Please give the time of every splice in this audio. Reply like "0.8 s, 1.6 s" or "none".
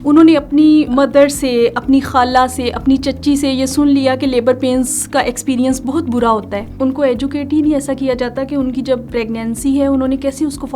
0.9 s, 6.6 s, 9.1 s

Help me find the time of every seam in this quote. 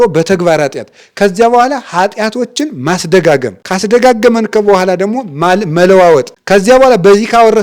3.6 s, 6.3 s

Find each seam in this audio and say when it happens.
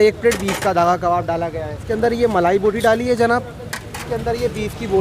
1.8 s, 4.0 s

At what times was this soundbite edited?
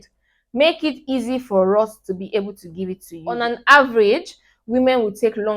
3.4 s

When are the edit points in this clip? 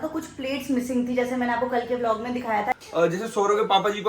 2.8 s

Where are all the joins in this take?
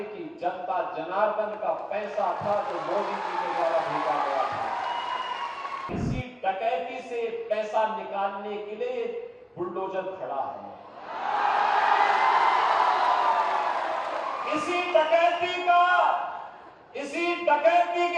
5.9 s

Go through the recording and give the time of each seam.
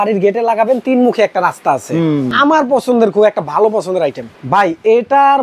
2.3 s, 4.3 s

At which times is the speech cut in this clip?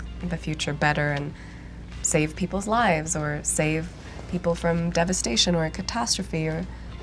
none

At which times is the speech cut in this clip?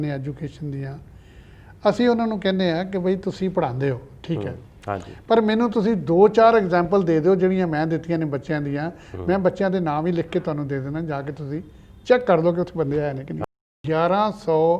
13.4 s

